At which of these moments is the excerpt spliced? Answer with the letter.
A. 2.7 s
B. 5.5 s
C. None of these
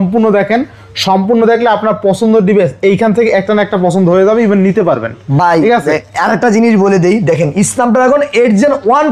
C